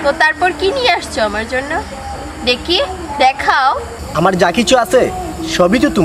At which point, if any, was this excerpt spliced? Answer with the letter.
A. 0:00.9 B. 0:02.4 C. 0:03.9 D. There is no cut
C